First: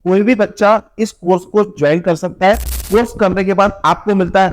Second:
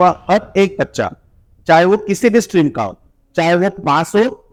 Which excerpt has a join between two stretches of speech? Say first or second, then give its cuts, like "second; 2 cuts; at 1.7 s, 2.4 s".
first; 1 cut; at 2.7 s